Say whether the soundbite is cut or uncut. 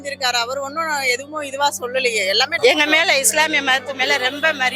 cut